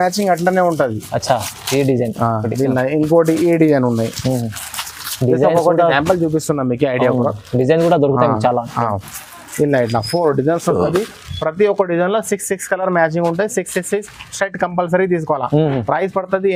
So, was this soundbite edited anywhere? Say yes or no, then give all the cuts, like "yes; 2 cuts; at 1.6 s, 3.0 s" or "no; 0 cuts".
no; 0 cuts